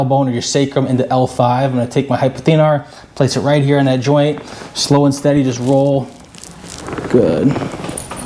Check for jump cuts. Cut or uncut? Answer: uncut